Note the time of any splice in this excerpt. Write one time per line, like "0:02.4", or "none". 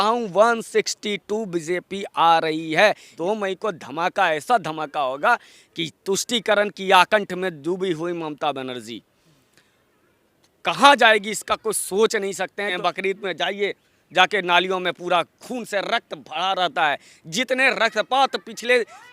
0:03.1
0:12.8